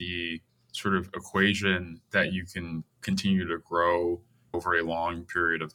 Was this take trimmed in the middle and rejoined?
yes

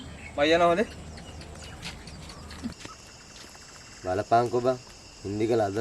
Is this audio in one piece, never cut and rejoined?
no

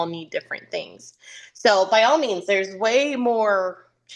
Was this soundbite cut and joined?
no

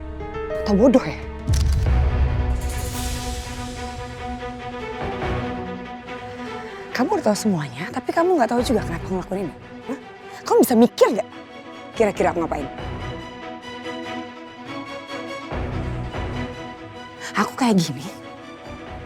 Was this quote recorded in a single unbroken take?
yes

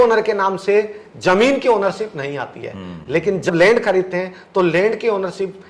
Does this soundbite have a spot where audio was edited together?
yes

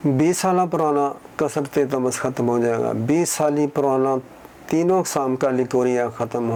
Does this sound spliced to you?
no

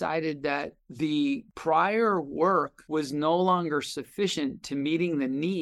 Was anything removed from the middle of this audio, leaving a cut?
yes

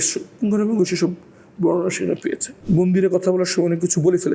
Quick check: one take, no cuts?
no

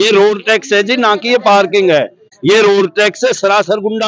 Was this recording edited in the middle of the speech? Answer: yes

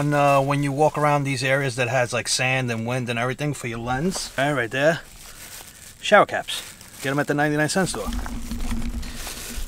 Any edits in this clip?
yes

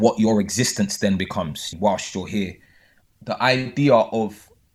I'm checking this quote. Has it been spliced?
yes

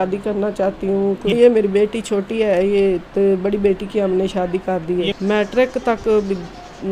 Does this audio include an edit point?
yes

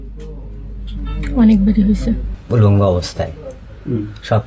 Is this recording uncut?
no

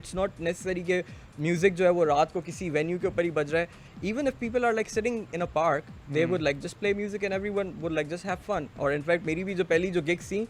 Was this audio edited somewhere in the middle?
no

